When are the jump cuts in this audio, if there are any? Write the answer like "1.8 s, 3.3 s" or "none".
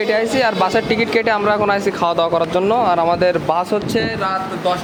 none